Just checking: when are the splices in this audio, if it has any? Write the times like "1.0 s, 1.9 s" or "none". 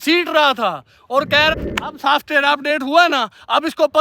1.5 s